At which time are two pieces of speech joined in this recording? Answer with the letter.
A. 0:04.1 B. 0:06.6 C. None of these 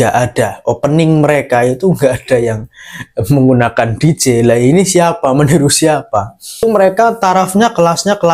B